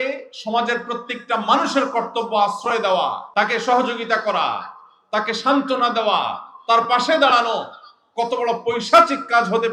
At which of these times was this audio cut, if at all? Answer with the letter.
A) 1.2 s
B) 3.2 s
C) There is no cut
B